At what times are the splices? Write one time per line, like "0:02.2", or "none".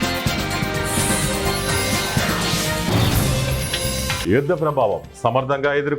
0:04.2